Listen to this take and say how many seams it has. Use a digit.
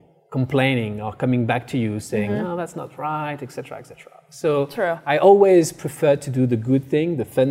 0